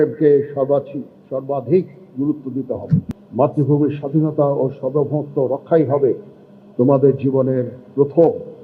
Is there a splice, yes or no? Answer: yes